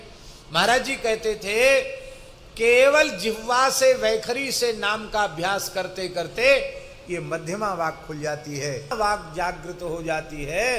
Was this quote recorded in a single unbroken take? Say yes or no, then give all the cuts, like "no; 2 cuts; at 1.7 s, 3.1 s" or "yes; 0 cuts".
no; 1 cut; at 8.9 s